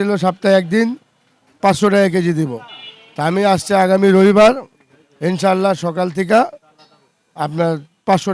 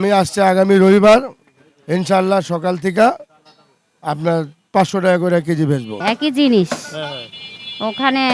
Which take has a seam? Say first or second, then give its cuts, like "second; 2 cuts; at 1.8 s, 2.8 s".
second; 1 cut; at 6.0 s